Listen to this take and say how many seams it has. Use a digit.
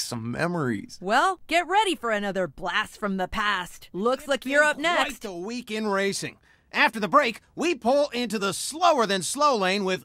0